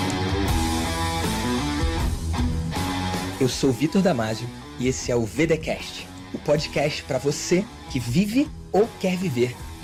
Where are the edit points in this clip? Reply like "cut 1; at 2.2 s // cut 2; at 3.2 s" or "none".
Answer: none